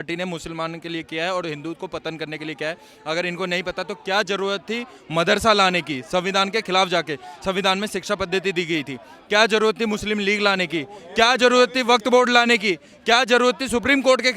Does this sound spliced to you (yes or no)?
no